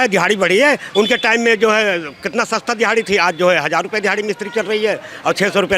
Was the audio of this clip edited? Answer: no; 0 cuts

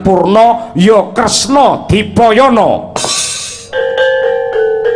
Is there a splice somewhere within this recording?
no; 0 cuts

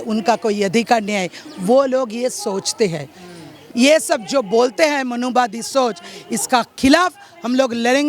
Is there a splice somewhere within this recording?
yes; 1 cut; at 3.6 s

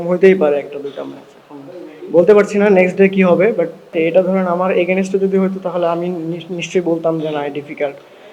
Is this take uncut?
no; 1 cut; at 3.9 s

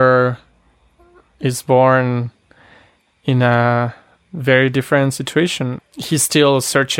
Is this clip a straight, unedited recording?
no; 1 cut; at 5.7 s

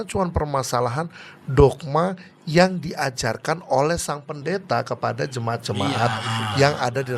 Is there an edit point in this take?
no; 0 cuts

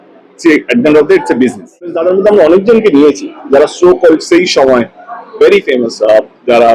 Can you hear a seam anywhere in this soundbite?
yes; 1 cut; at 2.0 s

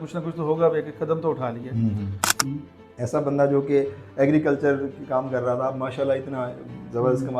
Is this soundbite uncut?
no; 1 cut; at 2.3 s

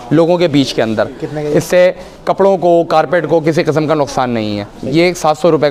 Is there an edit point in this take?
no; 0 cuts

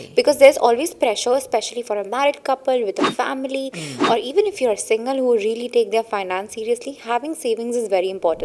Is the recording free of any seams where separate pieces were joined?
yes; 0 cuts

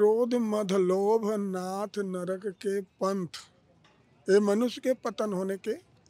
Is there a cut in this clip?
no; 0 cuts

